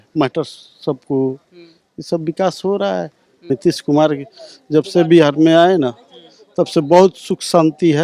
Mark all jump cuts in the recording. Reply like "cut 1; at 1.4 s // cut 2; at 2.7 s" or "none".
cut 1; at 3.5 s